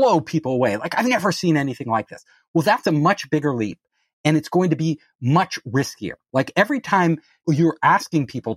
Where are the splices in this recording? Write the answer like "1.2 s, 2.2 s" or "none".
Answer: 7.3 s